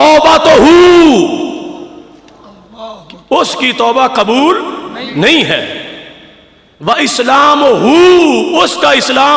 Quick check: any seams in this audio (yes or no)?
no